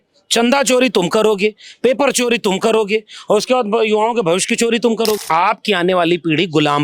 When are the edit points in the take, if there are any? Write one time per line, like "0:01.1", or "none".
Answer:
0:05.2